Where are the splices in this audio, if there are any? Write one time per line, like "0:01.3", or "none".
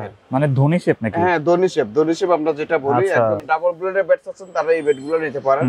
0:03.4